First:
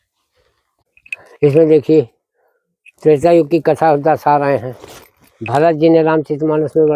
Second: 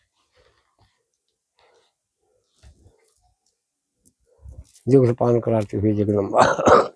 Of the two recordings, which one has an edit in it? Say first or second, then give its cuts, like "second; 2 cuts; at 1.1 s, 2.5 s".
first; 1 cut; at 1.0 s